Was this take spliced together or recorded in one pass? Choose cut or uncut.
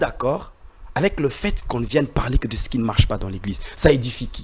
uncut